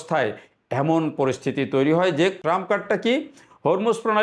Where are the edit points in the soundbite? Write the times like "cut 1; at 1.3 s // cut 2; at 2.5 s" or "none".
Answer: cut 1; at 2.4 s